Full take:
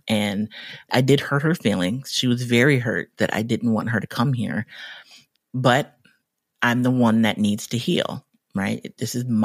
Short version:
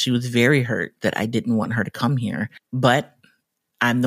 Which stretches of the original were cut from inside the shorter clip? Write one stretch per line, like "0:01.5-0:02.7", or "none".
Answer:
0:04.8-0:05.4